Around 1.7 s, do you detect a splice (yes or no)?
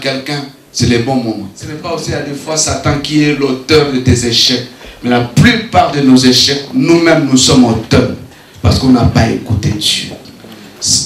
yes